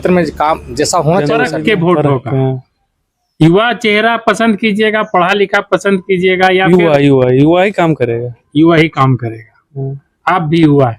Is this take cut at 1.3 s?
yes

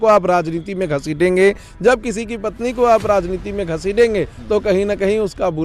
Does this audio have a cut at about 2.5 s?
no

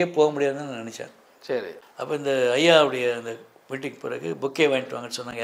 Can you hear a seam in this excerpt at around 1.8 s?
yes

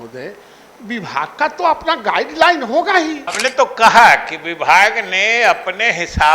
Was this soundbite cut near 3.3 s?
yes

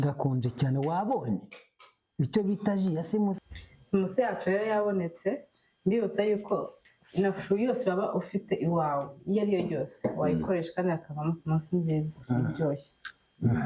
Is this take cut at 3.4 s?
yes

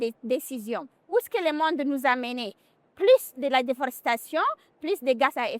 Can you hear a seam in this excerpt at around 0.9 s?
yes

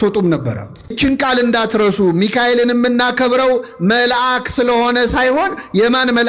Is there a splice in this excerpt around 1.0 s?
yes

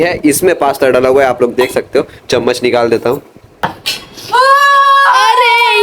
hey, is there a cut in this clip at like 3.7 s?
yes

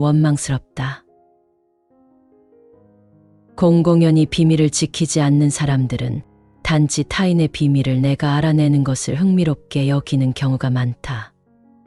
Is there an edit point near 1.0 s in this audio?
no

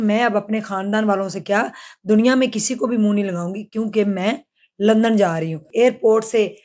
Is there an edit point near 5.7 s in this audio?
yes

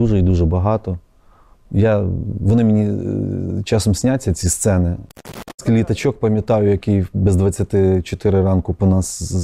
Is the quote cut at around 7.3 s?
no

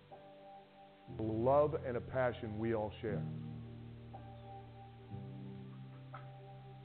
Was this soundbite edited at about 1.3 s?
yes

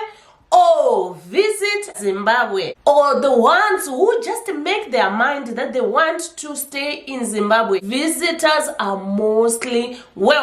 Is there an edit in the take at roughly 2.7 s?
yes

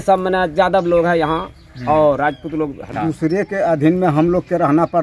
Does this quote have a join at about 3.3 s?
yes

